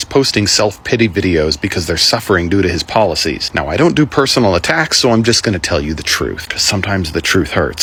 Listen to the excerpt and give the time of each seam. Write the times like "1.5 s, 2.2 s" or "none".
none